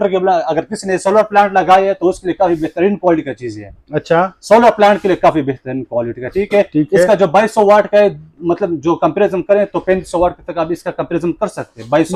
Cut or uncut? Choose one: uncut